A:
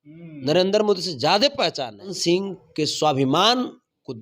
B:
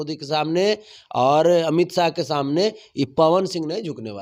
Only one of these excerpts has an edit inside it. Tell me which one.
A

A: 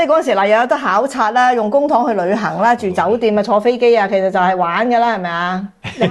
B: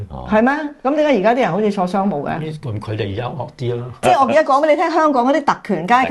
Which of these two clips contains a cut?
B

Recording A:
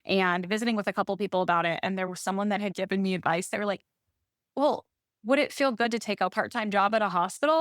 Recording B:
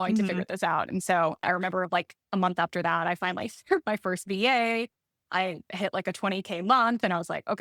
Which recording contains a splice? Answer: A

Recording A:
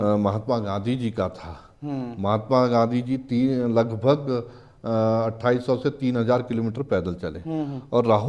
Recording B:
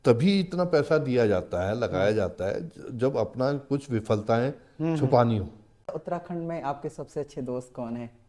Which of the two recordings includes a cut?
B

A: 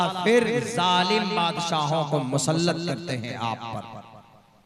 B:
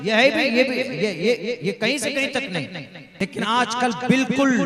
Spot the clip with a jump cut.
B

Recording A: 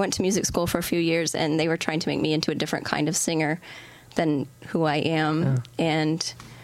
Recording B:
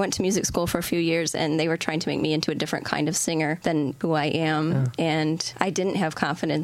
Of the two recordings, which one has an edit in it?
B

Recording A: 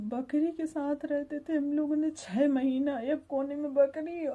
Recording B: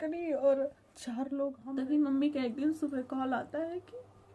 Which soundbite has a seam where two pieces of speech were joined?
B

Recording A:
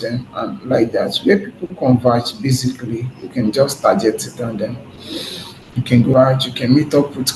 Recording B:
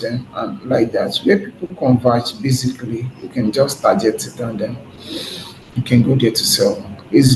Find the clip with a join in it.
A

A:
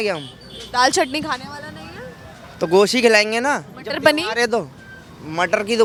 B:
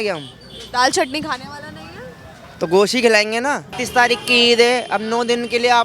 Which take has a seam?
B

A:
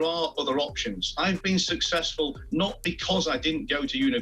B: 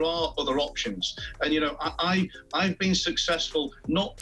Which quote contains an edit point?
A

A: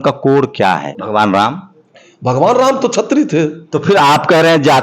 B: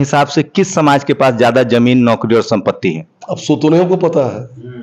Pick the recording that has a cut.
A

